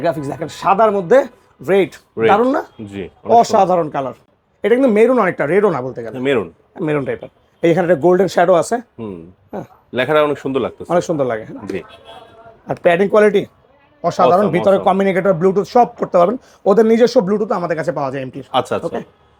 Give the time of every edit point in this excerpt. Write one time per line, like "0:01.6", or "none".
none